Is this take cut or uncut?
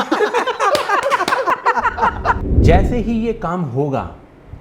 cut